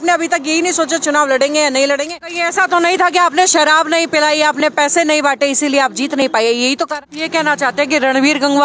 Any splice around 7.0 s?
yes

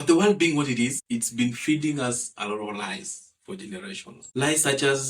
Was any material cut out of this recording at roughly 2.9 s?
no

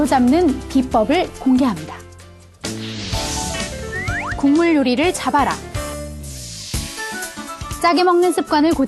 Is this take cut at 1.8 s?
no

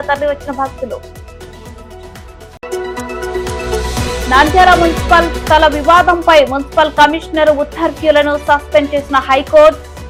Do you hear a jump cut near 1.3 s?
no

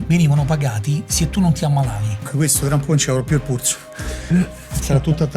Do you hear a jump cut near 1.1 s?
no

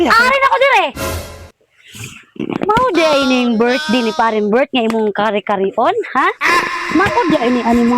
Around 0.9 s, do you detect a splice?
yes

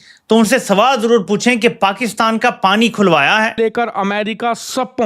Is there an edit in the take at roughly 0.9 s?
no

